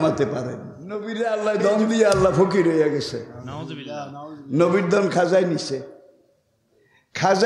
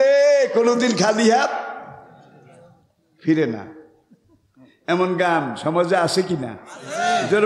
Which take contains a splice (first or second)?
first